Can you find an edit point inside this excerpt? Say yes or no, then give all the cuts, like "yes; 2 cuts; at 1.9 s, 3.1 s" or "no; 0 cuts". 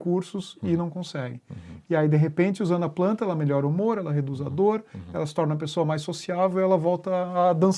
no; 0 cuts